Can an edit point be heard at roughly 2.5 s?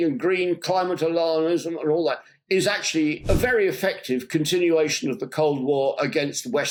no; 0 cuts

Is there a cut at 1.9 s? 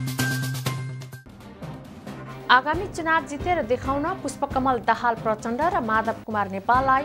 yes; 1 cut; at 1.9 s

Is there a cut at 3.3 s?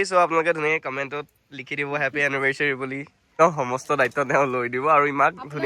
yes; 1 cut; at 3.3 s

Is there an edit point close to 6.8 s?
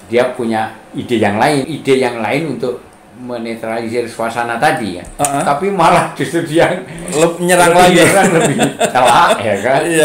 no; 1 cut; at 1.7 s

